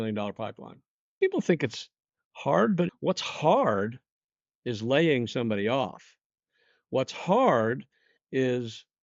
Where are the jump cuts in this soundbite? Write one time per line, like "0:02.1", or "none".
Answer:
0:01.1
0:02.9